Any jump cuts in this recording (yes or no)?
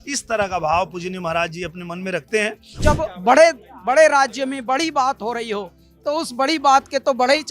yes